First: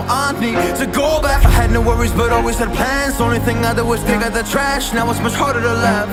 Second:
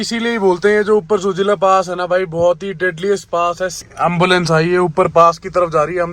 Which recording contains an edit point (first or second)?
second